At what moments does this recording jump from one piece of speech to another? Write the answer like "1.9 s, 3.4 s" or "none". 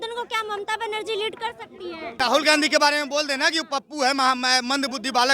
2.1 s